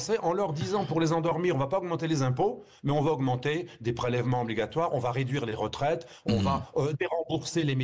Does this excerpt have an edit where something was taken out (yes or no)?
no